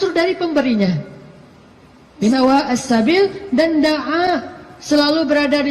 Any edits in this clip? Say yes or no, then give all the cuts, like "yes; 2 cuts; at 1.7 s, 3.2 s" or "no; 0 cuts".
yes; 1 cut; at 2.3 s